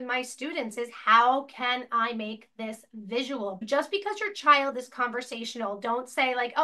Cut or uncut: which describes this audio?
cut